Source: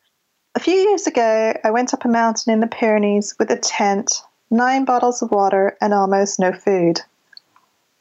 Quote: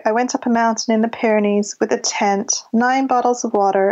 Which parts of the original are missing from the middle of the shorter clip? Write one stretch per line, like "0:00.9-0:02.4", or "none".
0:04.1-0:04.3